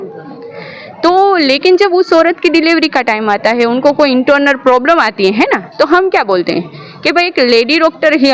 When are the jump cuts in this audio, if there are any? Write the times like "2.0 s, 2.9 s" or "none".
none

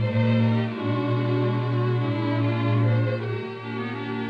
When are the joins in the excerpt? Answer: 1.9 s

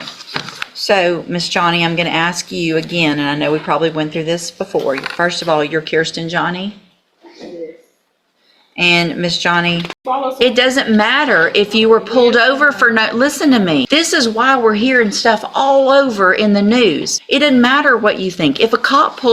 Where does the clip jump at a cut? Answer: 10.0 s, 13.9 s, 17.1 s

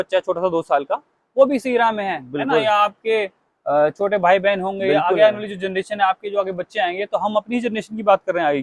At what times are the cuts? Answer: none

